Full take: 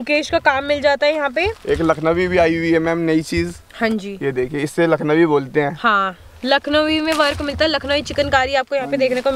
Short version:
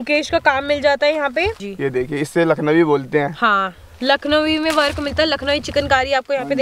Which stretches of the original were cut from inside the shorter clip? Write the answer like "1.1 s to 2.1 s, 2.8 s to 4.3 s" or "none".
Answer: 1.6 s to 4.0 s

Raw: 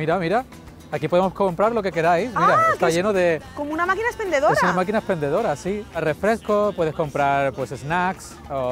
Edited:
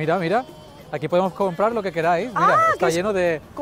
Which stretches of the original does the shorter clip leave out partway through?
none

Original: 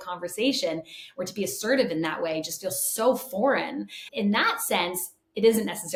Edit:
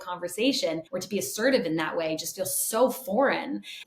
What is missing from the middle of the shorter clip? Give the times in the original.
0.9 s to 1.2 s

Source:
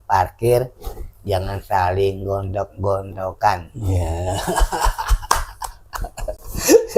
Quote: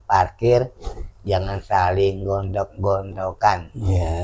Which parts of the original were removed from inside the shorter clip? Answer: none

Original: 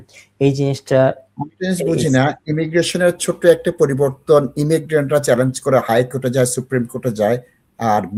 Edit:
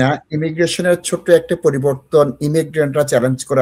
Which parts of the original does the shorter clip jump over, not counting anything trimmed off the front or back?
none

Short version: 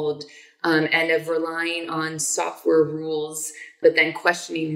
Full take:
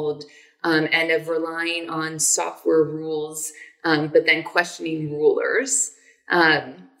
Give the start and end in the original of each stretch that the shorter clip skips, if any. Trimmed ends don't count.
3.8 s to 4.1 s

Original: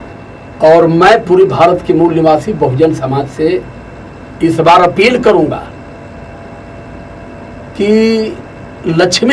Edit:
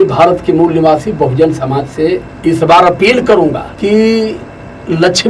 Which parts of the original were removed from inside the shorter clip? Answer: 3.7 s to 4.3 s, 5.7 s to 7.7 s

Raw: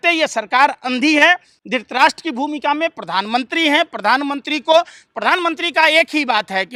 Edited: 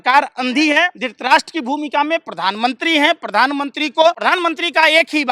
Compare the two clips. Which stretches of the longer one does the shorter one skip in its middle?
1.5 s to 1.7 s, 4.9 s to 5.2 s

